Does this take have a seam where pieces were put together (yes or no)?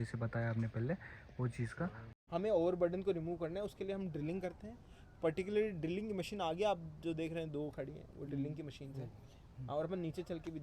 yes